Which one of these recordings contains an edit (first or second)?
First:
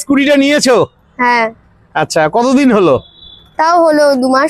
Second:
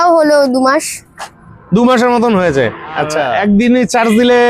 second